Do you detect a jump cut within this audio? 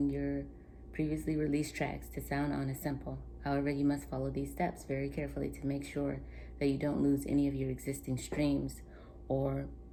no; 0 cuts

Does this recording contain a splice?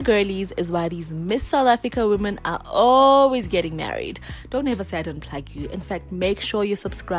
no; 0 cuts

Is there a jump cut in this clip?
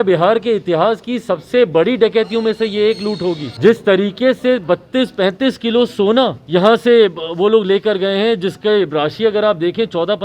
yes; 2 cuts; at 3.5 s, 6.4 s

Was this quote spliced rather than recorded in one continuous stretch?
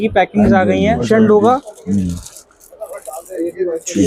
yes; 1 cut; at 1.0 s

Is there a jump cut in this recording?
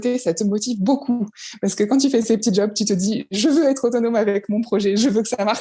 no; 0 cuts

